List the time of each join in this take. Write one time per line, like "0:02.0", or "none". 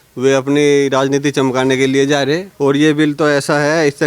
0:02.5